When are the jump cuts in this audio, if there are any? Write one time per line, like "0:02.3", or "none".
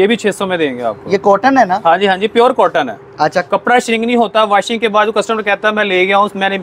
none